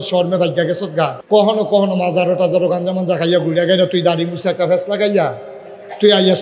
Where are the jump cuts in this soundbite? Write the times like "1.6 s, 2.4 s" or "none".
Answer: 1.2 s